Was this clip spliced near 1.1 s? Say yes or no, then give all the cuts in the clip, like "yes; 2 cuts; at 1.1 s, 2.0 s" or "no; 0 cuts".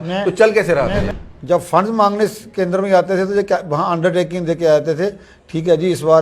yes; 1 cut; at 1.1 s